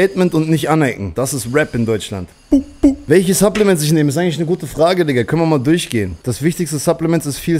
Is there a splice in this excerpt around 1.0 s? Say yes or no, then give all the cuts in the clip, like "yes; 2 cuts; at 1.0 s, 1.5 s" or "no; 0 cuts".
yes; 3 cuts; at 1.0 s, 2.4 s, 6.2 s